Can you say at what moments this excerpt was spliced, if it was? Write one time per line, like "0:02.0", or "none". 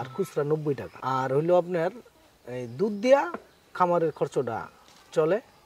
0:00.9